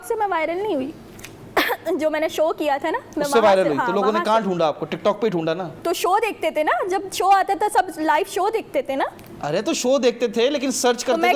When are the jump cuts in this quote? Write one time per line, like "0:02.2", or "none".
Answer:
none